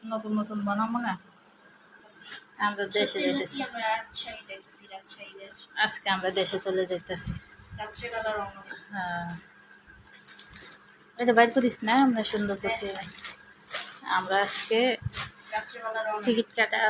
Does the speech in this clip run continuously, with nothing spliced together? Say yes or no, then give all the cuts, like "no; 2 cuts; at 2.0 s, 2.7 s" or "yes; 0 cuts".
no; 1 cut; at 1.9 s